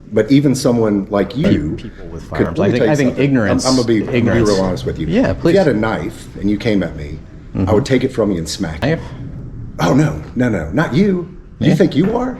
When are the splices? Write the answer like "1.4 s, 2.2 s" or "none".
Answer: 2.5 s, 8.8 s